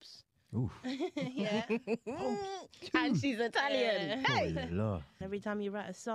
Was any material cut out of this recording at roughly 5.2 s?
yes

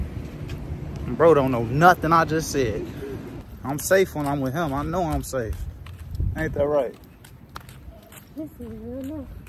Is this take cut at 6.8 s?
no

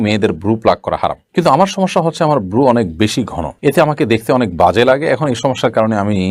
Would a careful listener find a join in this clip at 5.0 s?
no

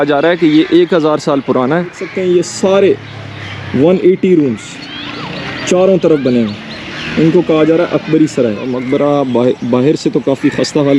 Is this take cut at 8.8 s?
yes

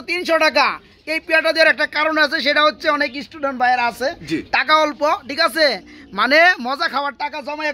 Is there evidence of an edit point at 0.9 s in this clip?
no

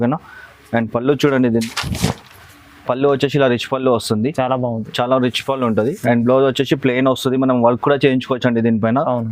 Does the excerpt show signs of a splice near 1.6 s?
yes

